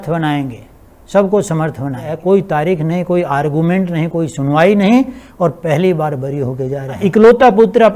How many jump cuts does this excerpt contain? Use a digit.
2